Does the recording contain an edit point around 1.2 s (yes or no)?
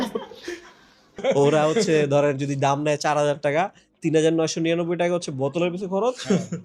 yes